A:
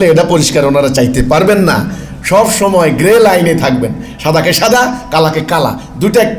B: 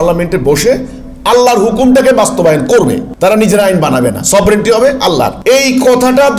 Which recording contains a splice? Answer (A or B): B